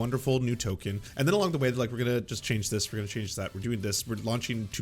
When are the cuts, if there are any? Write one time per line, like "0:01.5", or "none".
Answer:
0:01.0